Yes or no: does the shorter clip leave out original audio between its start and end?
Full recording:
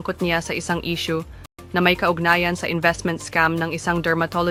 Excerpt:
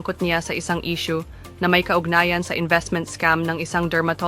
yes